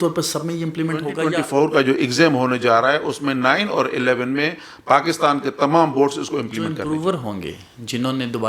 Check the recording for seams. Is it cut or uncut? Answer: cut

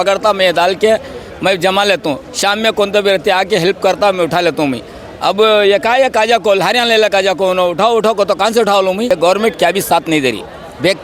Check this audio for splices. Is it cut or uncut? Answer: cut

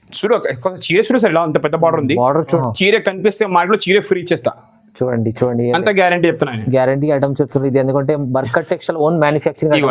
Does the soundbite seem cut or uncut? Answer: cut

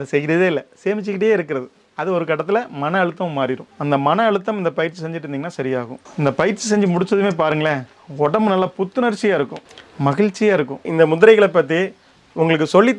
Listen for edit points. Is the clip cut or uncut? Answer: cut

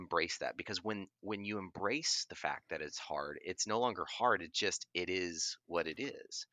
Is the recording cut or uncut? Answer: uncut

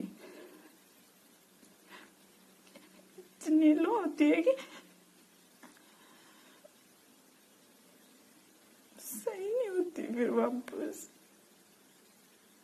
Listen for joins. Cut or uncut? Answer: uncut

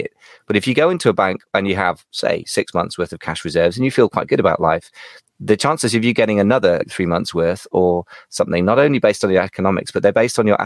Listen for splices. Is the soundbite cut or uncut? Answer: uncut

